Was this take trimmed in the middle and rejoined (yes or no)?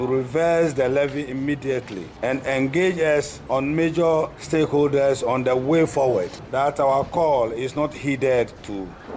yes